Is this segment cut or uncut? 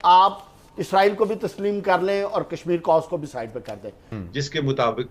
cut